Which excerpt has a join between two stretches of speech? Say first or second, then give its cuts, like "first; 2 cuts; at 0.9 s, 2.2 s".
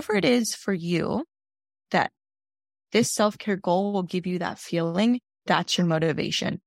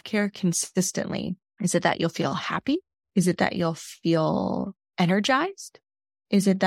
second; 2 cuts; at 1.4 s, 3.0 s